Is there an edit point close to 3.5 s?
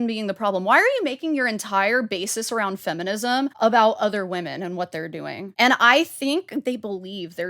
yes; 3 cuts; at 3.5 s, 5.5 s, 6.6 s

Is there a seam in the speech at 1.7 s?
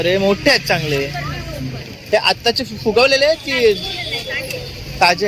no; 0 cuts

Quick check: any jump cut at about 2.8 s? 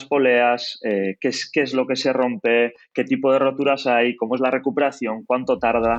no; 0 cuts

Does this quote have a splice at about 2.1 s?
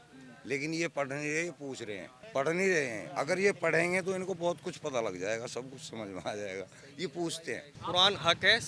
yes; 2 cuts; at 2.1 s, 7.7 s

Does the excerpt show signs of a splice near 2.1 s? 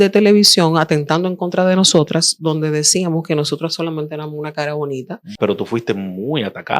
no; 1 cut; at 5.4 s

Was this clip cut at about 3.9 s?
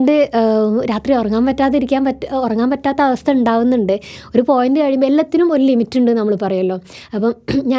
no; 0 cuts

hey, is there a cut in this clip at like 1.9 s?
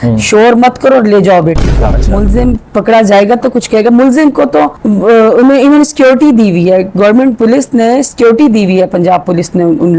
yes; 1 cut; at 1.9 s

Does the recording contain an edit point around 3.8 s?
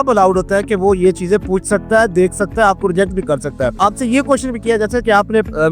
yes; 1 cut; at 3.8 s

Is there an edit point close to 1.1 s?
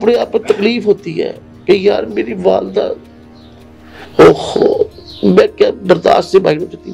no; 0 cuts

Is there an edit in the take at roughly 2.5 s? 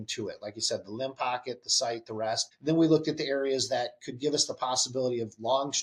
yes; 1 cut; at 2.5 s

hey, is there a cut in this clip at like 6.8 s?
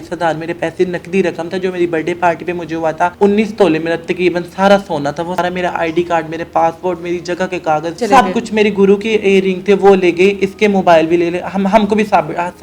no; 3 cuts; at 3.1 s, 5.4 s, 8.0 s

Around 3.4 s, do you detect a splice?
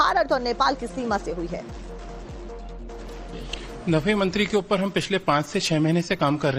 no; 1 cut; at 1.4 s

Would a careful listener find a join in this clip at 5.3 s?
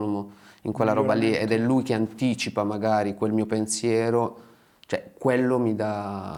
no; 0 cuts

